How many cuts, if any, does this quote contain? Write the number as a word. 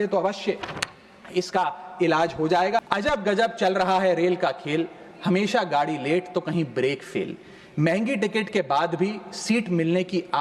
one